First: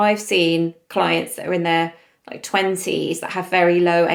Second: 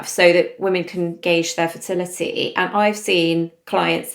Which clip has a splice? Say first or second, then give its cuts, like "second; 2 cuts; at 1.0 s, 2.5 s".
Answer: second; 1 cut; at 1.2 s